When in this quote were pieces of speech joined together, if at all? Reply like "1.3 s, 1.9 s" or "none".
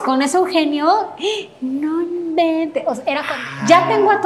3.2 s